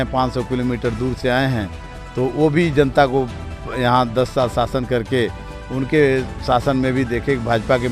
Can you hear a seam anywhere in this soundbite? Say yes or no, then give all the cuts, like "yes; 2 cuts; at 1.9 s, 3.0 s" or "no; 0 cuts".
no; 0 cuts